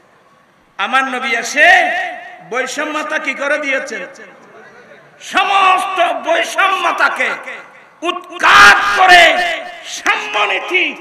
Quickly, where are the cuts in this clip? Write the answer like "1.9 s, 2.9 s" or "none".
none